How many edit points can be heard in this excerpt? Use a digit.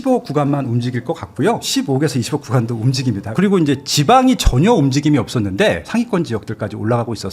3